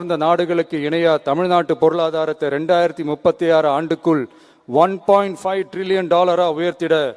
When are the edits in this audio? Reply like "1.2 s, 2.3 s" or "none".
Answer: none